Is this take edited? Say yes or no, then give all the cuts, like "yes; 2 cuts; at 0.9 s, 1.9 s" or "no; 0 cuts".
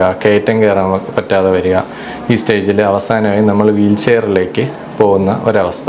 no; 0 cuts